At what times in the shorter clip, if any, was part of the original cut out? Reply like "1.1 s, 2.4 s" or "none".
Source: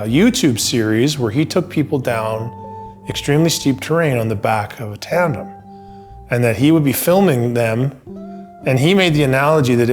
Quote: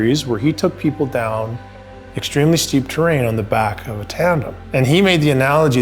4.6 s